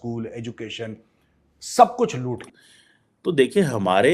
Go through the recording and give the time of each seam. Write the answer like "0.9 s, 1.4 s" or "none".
2.8 s

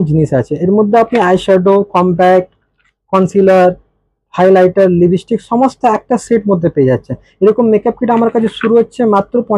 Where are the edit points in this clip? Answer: none

